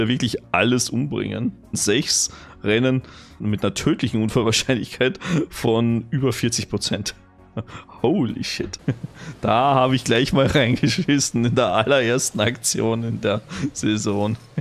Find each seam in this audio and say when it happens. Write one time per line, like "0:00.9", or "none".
0:01.8
0:03.4
0:08.7